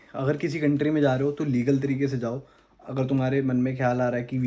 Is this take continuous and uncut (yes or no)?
yes